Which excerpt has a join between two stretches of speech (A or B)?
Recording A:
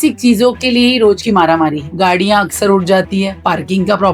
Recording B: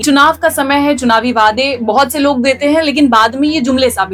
A